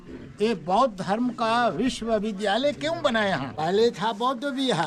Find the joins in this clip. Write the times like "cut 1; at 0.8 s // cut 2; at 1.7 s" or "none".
cut 1; at 3.5 s

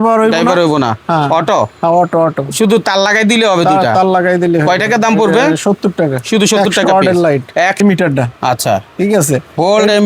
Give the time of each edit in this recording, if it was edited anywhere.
cut 1; at 7.8 s

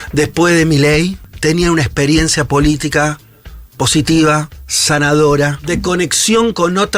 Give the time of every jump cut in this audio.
cut 1; at 1.2 s // cut 2; at 5.6 s

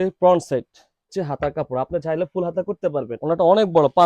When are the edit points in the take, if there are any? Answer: cut 1; at 1.1 s // cut 2; at 3.2 s

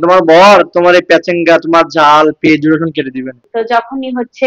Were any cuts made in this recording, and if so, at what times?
cut 1; at 3.4 s

